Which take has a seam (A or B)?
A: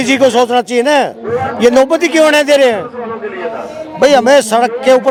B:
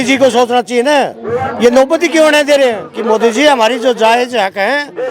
B